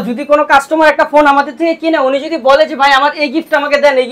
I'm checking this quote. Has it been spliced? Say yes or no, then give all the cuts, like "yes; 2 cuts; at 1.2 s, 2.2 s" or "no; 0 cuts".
no; 0 cuts